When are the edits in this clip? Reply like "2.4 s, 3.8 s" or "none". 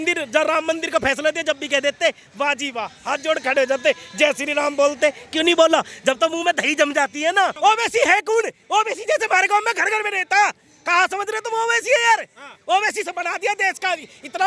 7.6 s